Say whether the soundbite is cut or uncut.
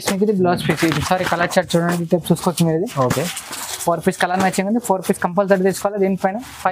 uncut